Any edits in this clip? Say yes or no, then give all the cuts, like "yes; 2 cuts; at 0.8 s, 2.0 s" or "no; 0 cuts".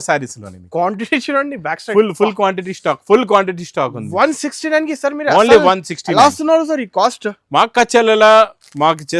no; 0 cuts